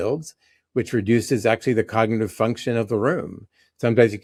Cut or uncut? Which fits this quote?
uncut